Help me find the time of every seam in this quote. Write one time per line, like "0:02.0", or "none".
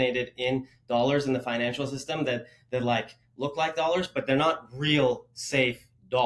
none